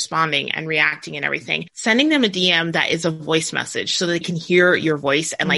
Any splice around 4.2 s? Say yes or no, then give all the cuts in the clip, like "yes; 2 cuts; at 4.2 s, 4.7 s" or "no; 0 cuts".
yes; 2 cuts; at 1.3 s, 4.2 s